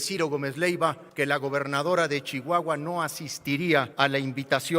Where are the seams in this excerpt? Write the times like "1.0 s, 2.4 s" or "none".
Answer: 1.0 s, 3.9 s

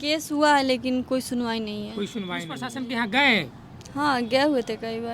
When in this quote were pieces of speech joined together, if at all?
2.6 s

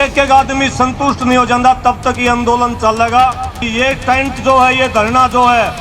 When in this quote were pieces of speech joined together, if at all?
3.7 s

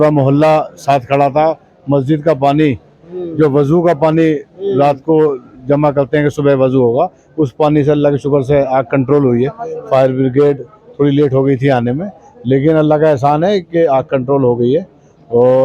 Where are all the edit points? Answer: none

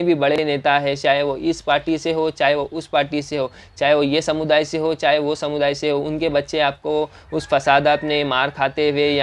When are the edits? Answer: none

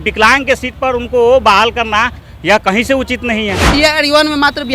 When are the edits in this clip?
3.6 s

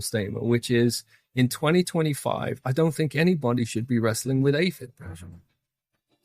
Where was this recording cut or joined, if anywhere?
none

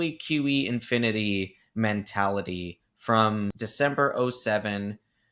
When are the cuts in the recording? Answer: 3.6 s

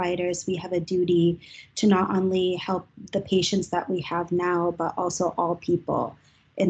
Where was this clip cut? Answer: none

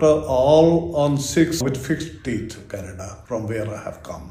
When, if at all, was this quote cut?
2.5 s

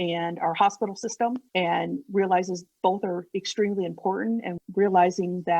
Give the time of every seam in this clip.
4.6 s

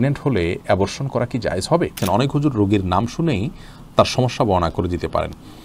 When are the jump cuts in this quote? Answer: 2.0 s

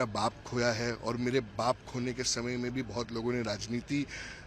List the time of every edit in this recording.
none

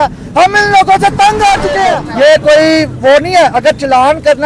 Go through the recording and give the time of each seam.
2.0 s

